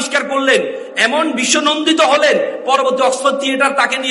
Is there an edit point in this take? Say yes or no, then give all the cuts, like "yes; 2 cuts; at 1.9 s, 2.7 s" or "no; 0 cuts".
no; 0 cuts